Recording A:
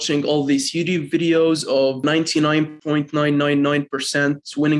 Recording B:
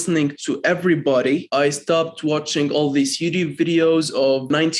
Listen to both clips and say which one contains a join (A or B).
B